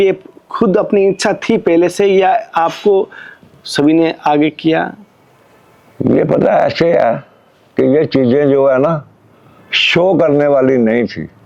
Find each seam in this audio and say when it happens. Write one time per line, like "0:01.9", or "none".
none